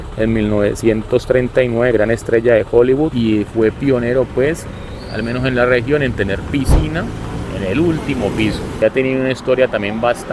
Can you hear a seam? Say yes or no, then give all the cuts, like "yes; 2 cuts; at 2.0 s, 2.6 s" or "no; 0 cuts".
yes; 2 cuts; at 3.1 s, 8.8 s